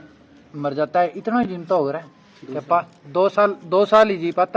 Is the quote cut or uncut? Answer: uncut